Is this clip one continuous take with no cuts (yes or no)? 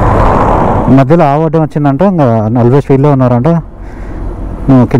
yes